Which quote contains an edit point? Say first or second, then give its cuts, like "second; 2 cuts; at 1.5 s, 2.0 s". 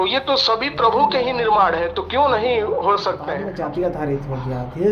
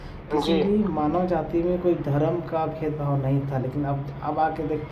first; 1 cut; at 3.4 s